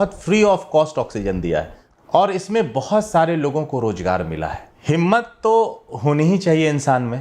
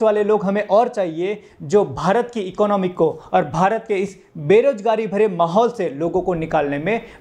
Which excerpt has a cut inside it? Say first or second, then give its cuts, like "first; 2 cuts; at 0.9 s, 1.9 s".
first; 2 cuts; at 1.8 s, 4.7 s